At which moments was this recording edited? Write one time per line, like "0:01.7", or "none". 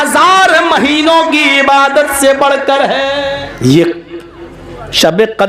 0:03.4